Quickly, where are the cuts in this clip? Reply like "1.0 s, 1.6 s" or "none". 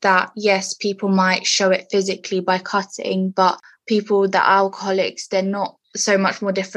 none